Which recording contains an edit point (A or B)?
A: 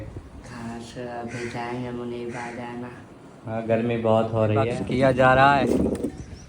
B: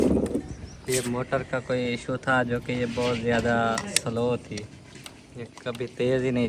A